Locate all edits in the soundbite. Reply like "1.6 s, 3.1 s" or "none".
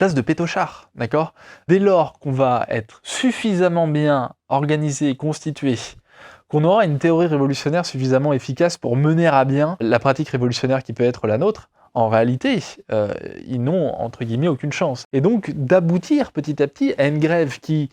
1.5 s, 9.8 s, 15.0 s